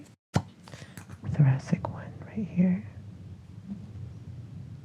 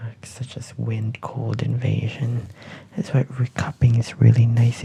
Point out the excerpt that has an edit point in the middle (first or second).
first